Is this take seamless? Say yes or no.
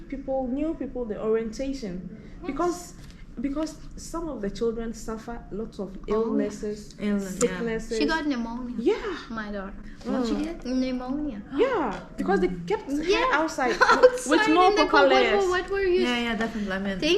yes